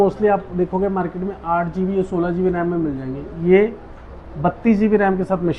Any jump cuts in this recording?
no; 0 cuts

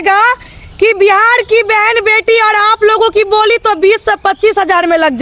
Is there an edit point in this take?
no; 0 cuts

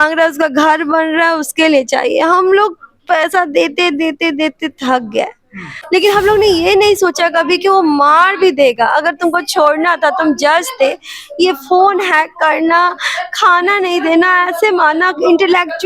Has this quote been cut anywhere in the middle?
yes; 1 cut; at 5.7 s

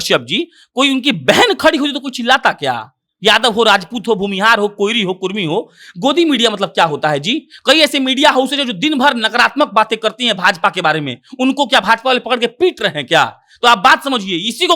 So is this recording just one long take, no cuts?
yes; 0 cuts

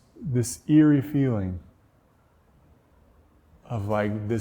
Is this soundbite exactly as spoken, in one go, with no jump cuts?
yes; 0 cuts

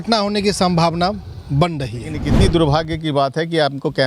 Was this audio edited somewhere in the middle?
yes; 1 cut; at 2.3 s

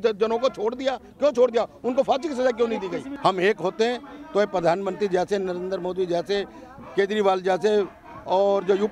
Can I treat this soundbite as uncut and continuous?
no; 1 cut; at 3.1 s

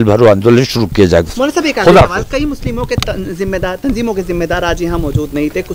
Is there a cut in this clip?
no; 0 cuts

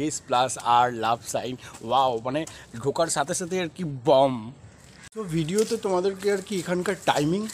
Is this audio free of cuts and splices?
no; 1 cut; at 5.0 s

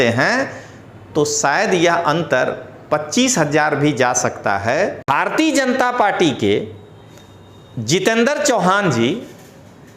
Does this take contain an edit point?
yes; 1 cut; at 5.0 s

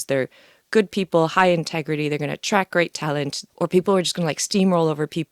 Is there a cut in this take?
yes; 1 cut; at 3.4 s

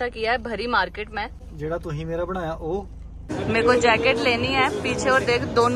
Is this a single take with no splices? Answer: no; 2 cuts; at 1.4 s, 3.2 s

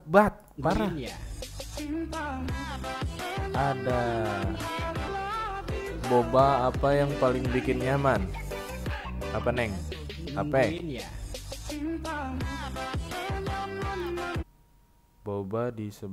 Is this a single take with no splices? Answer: no; 1 cut; at 5.1 s

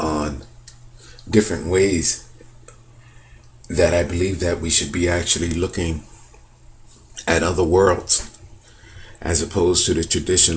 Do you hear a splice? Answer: no; 0 cuts

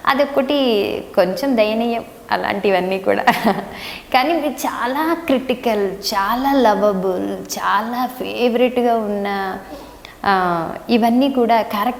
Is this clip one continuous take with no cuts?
yes; 0 cuts

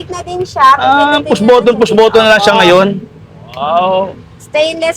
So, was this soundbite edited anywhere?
no; 0 cuts

